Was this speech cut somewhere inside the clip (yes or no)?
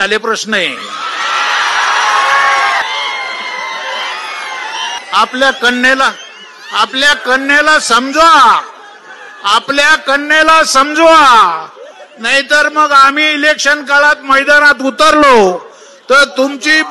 yes